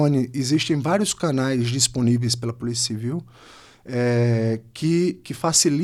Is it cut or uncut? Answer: uncut